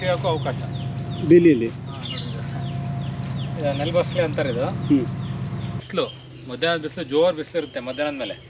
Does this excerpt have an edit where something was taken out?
yes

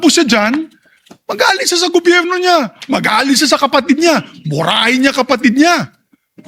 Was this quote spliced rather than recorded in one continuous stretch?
no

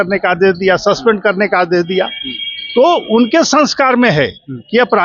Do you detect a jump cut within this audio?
no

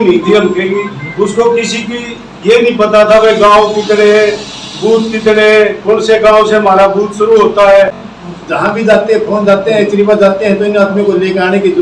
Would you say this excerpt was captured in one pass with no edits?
no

